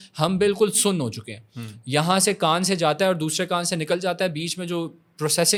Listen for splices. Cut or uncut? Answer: uncut